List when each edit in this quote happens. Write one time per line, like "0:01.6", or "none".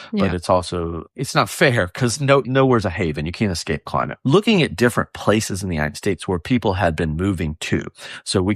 0:01.0
0:02.5
0:04.1